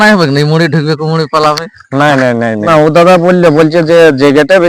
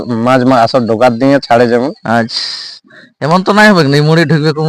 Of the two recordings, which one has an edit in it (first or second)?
first